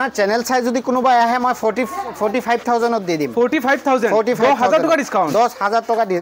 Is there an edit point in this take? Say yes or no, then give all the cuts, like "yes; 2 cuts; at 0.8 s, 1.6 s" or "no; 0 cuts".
no; 0 cuts